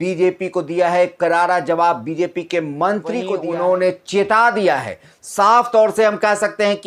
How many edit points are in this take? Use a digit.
1